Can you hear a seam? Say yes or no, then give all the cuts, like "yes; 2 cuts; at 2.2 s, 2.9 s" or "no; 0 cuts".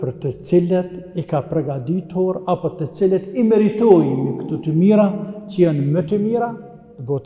no; 0 cuts